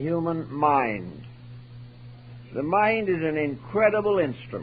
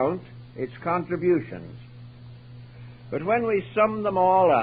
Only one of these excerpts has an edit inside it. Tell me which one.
first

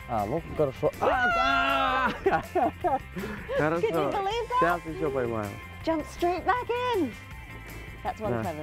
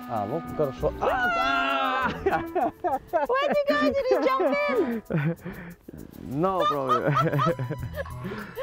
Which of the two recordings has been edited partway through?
first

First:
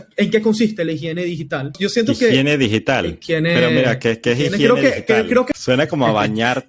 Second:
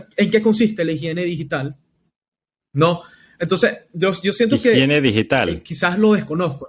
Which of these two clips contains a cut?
first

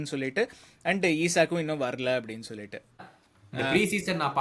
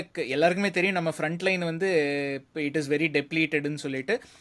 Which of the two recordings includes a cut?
first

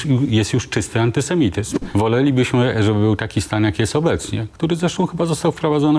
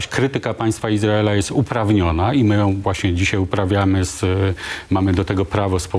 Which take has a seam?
first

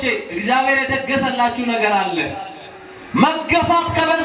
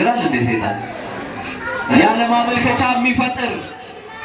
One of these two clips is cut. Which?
second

